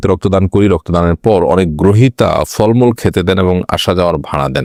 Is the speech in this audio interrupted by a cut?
no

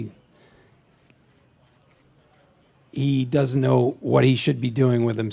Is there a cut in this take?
no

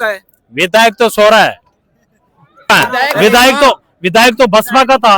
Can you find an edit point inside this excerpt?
yes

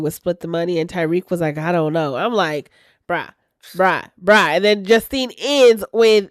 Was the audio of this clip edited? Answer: no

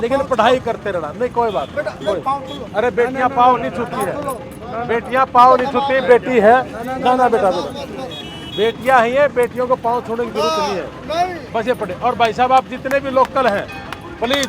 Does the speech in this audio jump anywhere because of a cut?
no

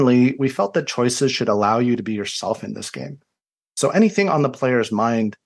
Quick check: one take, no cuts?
yes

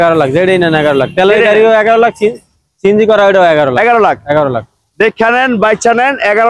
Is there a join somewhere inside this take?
no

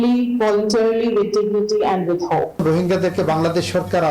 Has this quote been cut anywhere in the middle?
yes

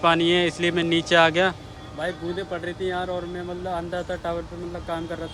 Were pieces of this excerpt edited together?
no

